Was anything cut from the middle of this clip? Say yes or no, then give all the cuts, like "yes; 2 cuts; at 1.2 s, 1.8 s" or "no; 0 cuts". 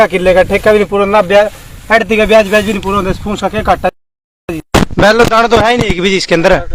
no; 0 cuts